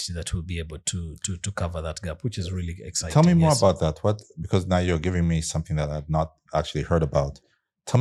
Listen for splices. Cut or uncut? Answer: uncut